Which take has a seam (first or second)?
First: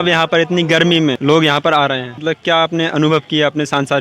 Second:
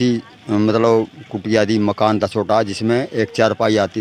first